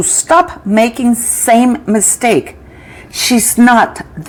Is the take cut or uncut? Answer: uncut